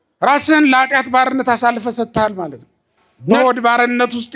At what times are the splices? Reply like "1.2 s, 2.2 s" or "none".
3.4 s